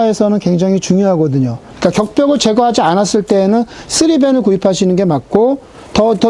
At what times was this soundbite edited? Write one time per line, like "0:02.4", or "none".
0:01.6